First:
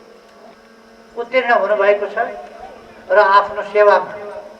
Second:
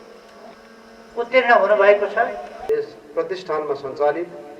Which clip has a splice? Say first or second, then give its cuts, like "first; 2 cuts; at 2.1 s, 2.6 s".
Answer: second; 1 cut; at 2.6 s